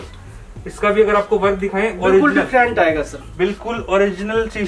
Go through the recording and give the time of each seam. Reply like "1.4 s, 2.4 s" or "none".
none